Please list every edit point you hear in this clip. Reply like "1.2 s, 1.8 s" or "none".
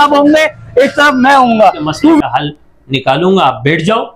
2.2 s